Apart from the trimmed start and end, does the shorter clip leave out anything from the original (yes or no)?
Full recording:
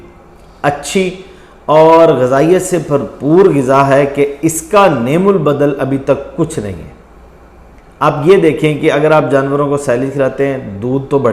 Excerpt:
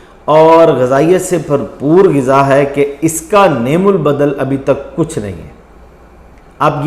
no